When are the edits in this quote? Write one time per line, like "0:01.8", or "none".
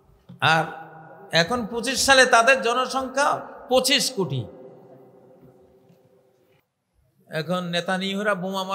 0:06.7